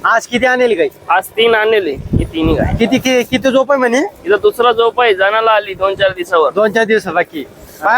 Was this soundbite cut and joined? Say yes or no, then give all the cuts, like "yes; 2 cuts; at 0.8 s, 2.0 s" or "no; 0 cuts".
no; 0 cuts